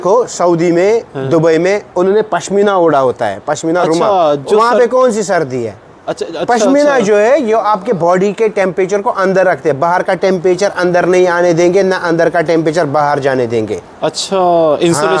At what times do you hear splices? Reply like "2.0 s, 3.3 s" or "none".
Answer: none